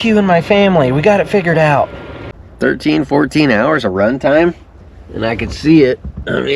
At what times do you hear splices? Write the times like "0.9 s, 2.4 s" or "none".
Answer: 2.1 s